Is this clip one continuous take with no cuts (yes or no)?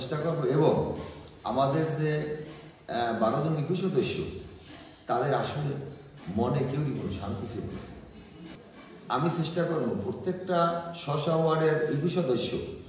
yes